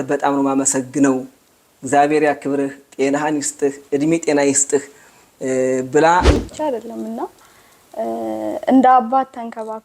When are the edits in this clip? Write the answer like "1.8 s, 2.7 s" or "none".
6.4 s